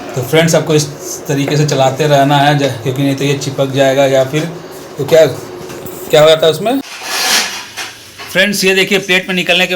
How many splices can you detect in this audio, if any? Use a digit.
1